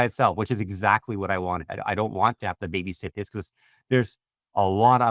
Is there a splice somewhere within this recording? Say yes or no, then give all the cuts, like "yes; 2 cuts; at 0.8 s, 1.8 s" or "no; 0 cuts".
no; 0 cuts